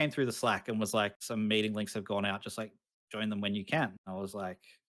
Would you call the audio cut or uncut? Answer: cut